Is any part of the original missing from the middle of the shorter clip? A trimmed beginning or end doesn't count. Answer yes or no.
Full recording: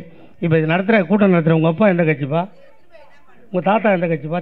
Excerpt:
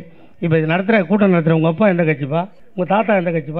yes